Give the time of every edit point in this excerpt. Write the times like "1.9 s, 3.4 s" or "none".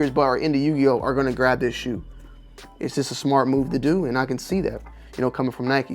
none